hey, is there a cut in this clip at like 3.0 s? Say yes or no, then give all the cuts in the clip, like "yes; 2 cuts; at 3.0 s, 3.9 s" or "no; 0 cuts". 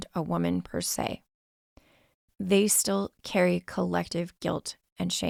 no; 0 cuts